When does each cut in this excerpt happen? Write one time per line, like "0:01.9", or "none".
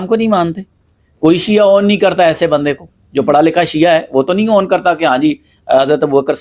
none